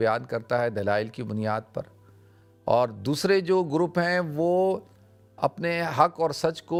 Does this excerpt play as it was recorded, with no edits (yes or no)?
yes